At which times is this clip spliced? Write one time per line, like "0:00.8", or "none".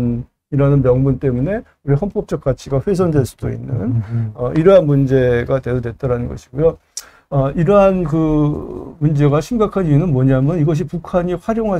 none